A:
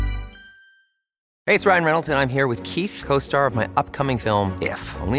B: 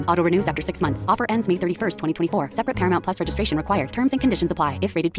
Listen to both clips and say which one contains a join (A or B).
A